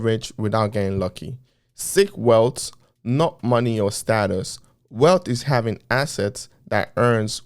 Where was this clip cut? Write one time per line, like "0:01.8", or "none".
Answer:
none